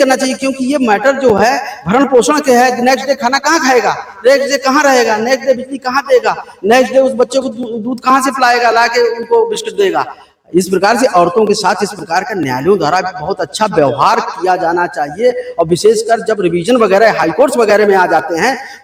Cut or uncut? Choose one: uncut